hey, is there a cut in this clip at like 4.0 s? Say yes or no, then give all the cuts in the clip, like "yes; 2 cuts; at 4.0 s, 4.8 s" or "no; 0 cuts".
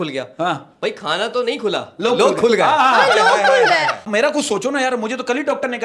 yes; 1 cut; at 4.0 s